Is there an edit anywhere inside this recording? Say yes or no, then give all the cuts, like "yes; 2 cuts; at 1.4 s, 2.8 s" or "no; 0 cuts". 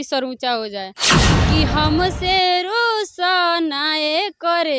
yes; 1 cut; at 1.2 s